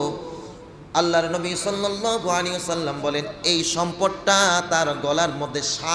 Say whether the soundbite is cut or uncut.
uncut